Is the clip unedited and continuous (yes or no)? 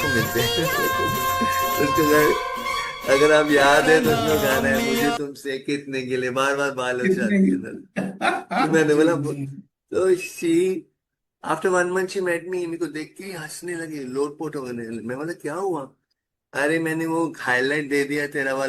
yes